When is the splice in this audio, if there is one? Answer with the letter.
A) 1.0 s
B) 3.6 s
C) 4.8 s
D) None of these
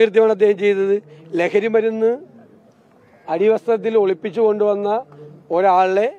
D